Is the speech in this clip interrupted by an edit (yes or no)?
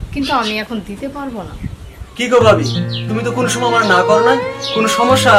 no